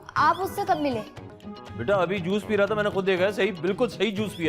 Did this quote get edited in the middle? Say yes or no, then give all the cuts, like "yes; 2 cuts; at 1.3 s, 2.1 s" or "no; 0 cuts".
no; 0 cuts